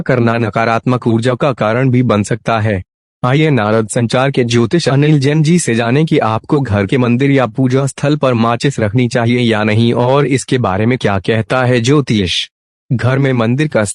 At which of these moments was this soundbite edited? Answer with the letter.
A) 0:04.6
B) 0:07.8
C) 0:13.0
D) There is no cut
C